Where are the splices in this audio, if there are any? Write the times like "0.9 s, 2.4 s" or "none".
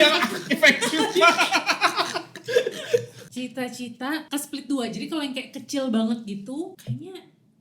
3.2 s, 4.2 s